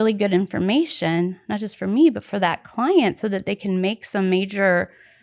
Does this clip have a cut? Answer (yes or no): no